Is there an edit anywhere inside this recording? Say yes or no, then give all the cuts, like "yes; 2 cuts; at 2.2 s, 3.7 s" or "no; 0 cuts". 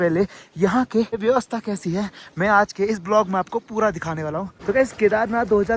yes; 2 cuts; at 1.2 s, 4.5 s